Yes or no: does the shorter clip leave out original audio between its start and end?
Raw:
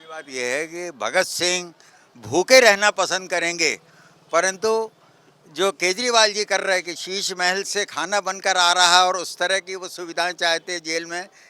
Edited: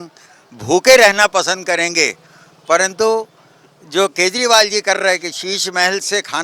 no